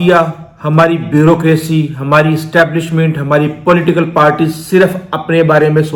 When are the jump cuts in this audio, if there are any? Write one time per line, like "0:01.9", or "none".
none